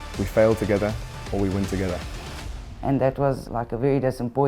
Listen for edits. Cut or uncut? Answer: cut